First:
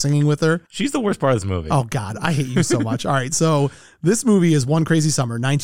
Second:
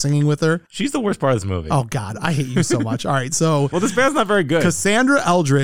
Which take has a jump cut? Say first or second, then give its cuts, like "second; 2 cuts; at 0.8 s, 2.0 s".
second; 1 cut; at 3.7 s